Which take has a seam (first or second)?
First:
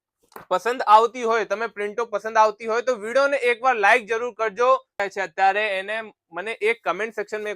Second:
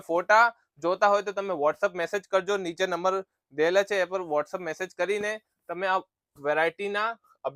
first